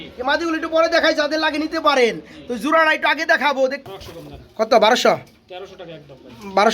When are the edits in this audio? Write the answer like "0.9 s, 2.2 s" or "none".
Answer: 3.9 s

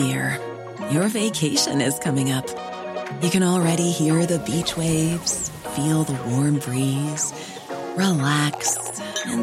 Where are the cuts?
none

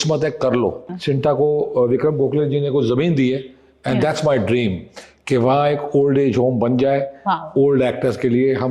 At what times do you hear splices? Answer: 0.9 s

